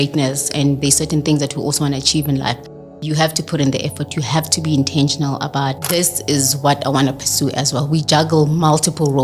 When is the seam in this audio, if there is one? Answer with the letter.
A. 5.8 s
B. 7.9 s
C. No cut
A